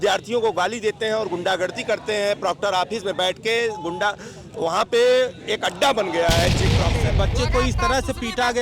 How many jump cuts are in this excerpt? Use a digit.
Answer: 1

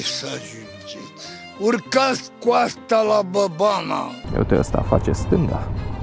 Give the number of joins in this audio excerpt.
1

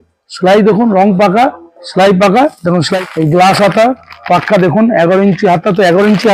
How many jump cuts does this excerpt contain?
1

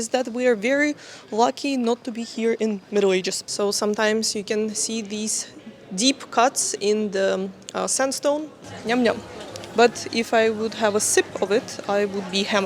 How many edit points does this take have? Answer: 2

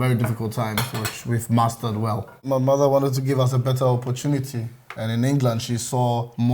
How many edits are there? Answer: 0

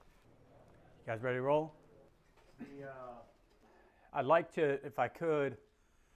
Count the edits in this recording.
0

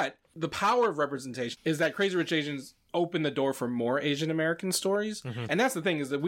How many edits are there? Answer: 0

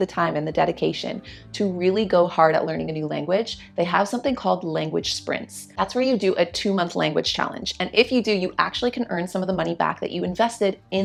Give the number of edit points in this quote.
0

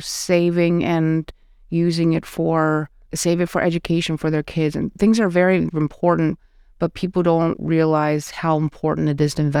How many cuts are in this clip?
0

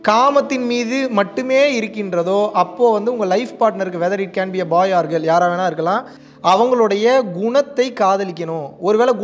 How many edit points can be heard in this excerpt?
1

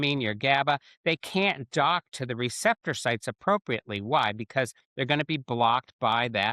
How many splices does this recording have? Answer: 0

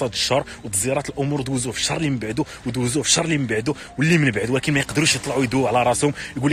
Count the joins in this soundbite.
0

